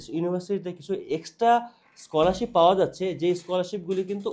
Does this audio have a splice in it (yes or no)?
no